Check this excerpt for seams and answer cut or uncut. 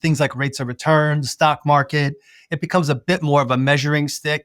uncut